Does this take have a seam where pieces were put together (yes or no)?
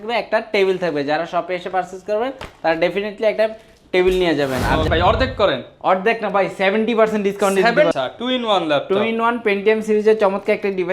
yes